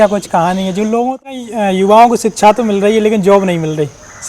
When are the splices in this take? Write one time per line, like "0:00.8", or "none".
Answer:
0:01.2